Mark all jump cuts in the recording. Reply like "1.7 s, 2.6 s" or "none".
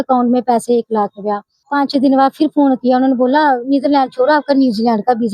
1.6 s